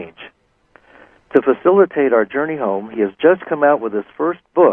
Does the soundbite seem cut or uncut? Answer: cut